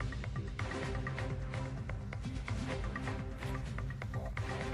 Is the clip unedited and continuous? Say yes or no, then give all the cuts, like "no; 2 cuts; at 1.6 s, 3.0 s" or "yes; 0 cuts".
no; 1 cut; at 3.4 s